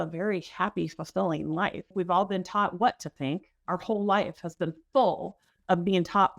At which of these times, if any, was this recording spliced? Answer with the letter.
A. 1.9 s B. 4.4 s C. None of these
A